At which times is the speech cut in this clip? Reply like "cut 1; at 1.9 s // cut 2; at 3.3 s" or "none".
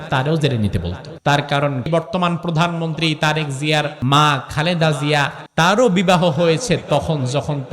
cut 1; at 1.0 s // cut 2; at 1.9 s // cut 3; at 3.9 s // cut 4; at 5.4 s